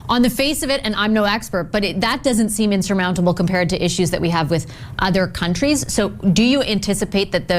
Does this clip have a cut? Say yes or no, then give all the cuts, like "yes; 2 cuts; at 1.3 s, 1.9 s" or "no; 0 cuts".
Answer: no; 0 cuts